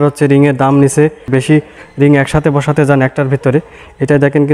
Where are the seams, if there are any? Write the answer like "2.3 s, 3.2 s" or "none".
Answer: 1.3 s

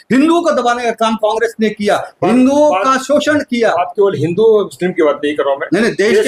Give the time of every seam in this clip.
none

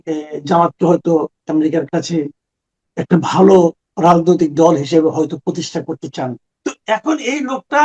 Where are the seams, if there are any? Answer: 6.5 s

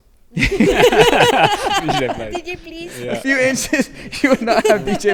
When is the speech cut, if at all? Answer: none

